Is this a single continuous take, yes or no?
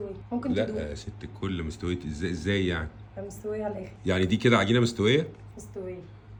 yes